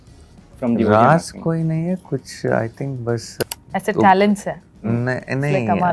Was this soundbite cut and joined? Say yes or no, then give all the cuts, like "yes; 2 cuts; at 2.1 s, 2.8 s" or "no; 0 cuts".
yes; 1 cut; at 3.3 s